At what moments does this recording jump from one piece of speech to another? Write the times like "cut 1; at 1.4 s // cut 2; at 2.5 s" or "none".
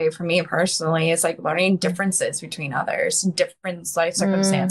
none